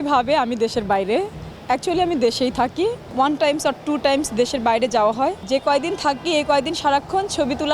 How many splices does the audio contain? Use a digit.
2